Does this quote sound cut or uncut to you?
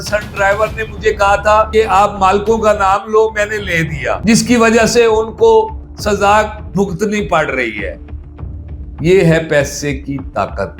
uncut